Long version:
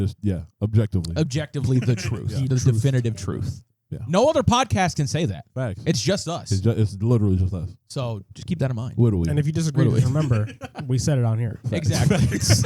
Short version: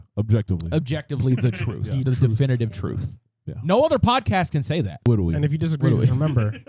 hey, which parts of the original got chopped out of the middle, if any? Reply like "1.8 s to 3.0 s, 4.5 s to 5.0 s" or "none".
5.4 s to 8.9 s